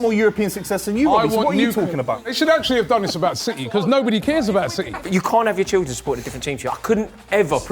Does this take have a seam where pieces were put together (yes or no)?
yes